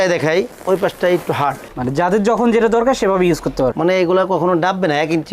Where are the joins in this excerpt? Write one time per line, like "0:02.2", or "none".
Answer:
0:03.7